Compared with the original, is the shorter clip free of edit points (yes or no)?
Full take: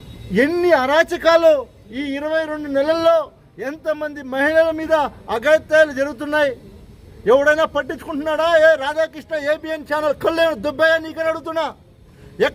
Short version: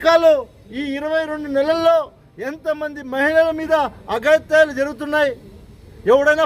yes